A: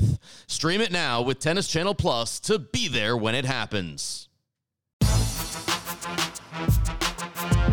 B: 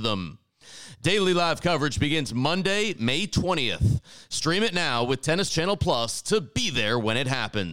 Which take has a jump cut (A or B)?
A